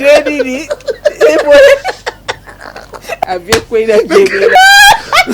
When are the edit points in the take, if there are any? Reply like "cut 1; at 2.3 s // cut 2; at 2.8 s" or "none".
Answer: cut 1; at 3.2 s // cut 2; at 4.5 s

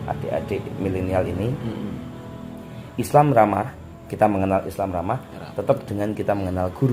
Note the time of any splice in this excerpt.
none

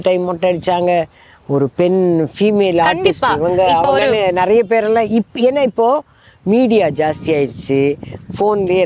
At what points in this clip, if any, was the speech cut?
none

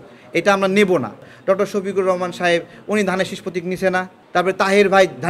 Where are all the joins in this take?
cut 1; at 1.3 s // cut 2; at 4.2 s

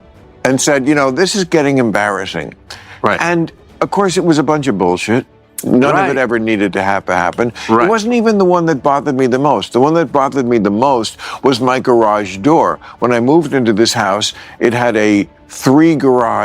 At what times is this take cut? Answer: cut 1; at 15.4 s

